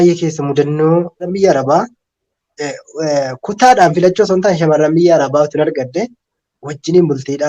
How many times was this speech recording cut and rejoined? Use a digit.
1